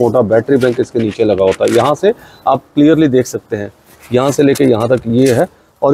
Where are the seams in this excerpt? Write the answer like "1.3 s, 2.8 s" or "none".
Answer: none